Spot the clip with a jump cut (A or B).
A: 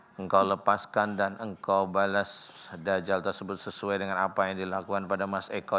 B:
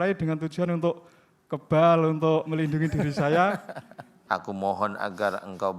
B